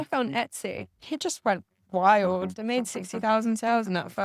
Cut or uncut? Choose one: cut